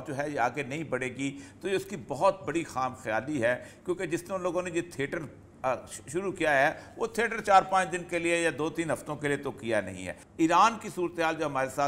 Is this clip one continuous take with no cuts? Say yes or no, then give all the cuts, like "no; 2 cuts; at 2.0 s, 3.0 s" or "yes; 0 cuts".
no; 1 cut; at 10.2 s